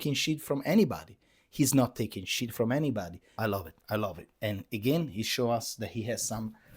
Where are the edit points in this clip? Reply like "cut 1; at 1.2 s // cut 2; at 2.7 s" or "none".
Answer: cut 1; at 3.2 s